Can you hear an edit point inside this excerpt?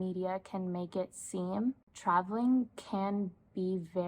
yes; 1 cut; at 1.9 s

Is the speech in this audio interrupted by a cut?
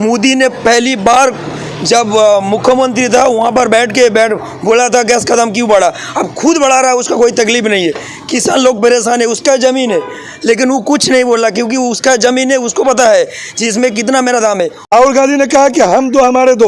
yes; 1 cut; at 14.9 s

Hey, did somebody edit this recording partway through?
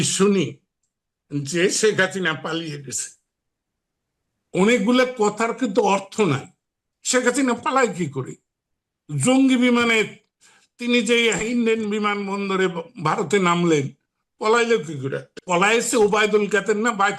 yes; 1 cut; at 15.3 s

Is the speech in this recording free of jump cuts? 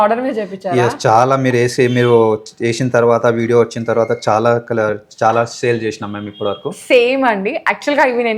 yes; 0 cuts

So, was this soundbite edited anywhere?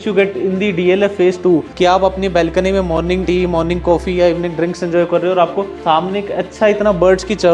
no; 0 cuts

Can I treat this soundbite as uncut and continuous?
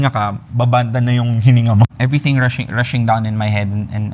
no; 1 cut; at 1.9 s

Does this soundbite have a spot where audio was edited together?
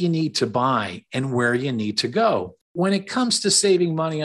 yes; 1 cut; at 2.6 s

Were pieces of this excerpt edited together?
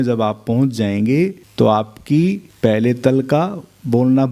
yes; 2 cuts; at 1.4 s, 2.5 s

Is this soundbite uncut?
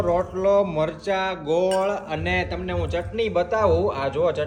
yes; 0 cuts

